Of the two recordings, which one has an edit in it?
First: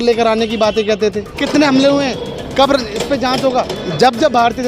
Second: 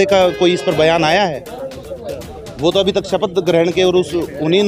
first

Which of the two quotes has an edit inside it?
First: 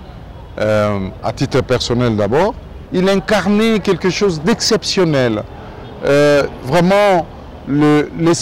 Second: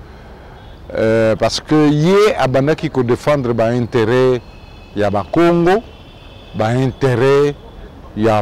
first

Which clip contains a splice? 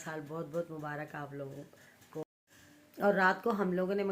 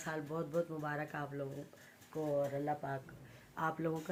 first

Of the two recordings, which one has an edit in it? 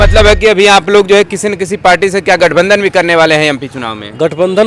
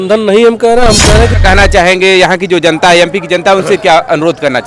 second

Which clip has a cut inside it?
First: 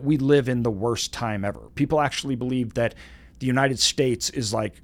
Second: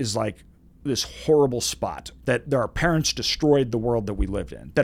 second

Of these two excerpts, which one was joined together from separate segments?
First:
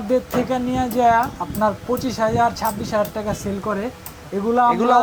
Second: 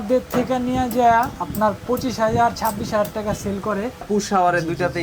second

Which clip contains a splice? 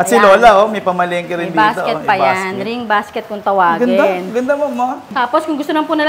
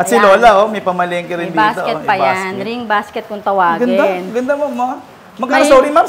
first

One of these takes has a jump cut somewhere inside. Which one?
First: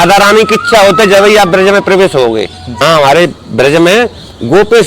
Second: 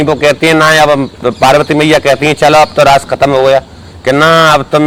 first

